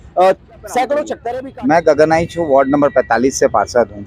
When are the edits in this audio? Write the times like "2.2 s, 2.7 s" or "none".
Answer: 1.2 s